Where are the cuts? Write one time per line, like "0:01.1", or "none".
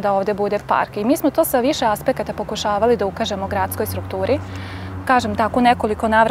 none